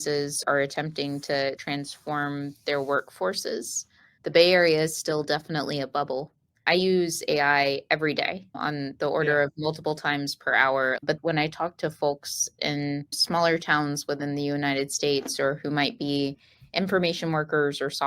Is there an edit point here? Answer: yes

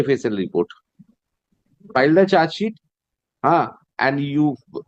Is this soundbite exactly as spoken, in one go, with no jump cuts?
no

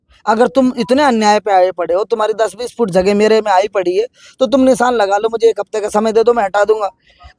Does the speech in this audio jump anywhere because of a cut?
no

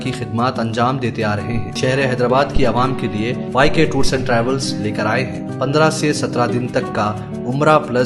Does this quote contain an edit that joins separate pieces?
yes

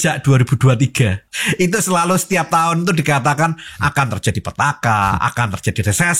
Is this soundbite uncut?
no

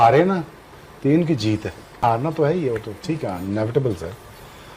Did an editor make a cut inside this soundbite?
yes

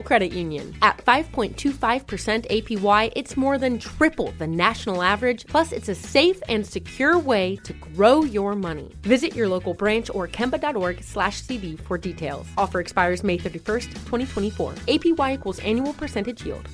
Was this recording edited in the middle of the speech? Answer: no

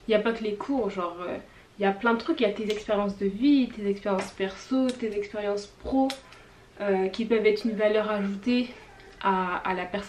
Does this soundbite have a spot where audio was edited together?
no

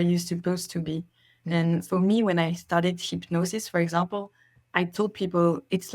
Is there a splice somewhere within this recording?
no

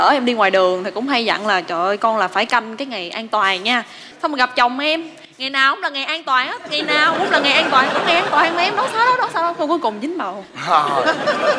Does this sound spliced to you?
no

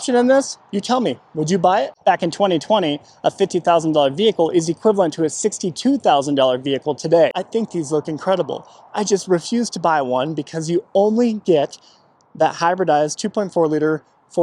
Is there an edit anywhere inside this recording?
yes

